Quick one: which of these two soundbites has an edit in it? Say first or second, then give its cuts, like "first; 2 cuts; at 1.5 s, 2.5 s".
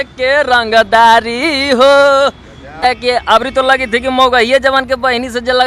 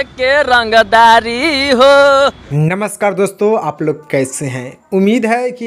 first; 1 cut; at 2.8 s